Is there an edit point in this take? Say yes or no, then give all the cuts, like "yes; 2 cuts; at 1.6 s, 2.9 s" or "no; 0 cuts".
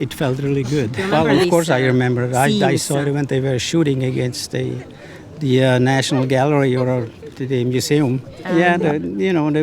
yes; 2 cuts; at 1.0 s, 8.3 s